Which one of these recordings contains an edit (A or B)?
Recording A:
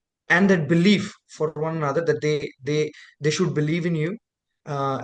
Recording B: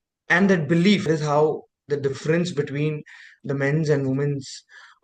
B